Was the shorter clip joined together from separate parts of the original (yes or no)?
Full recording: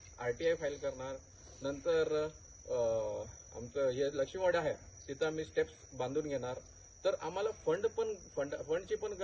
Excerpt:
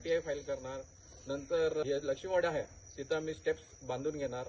yes